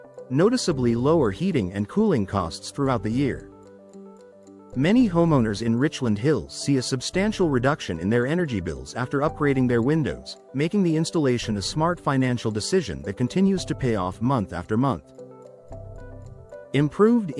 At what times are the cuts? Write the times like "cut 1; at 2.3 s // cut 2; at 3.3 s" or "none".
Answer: none